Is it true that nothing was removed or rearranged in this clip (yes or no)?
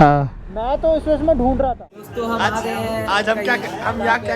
no